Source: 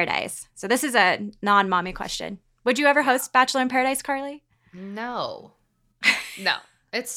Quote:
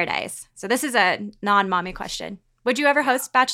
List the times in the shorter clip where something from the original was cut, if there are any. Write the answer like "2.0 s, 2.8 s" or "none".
none